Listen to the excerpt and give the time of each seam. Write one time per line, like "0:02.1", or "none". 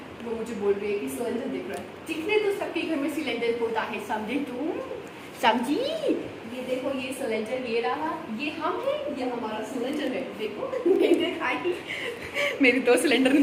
none